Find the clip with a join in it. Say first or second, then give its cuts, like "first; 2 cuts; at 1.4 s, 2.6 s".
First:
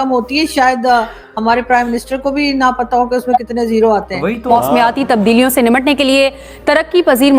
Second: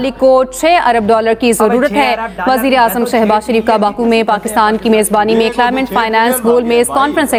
first; 1 cut; at 4.5 s